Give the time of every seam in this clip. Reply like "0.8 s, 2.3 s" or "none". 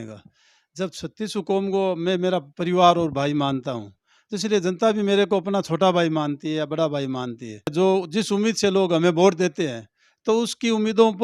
7.7 s